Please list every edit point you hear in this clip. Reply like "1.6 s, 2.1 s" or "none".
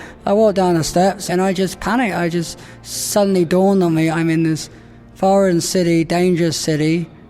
1.3 s

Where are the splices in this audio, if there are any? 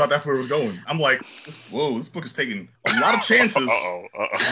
1.2 s, 2.7 s

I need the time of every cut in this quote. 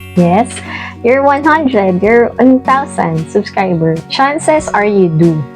2.3 s

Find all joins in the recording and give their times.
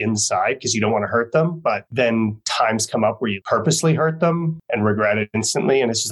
1.9 s, 3.4 s, 4.6 s

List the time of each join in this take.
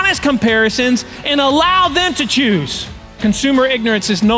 3.2 s

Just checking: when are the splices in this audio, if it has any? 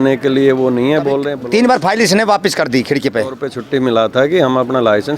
1.3 s, 3.5 s

